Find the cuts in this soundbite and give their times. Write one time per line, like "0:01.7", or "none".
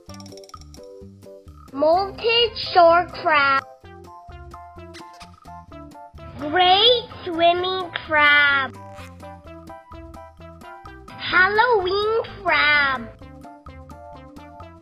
0:01.1
0:03.6
0:06.4
0:08.7
0:11.3
0:13.2